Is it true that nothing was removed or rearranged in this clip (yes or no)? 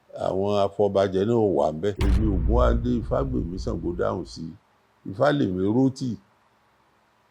no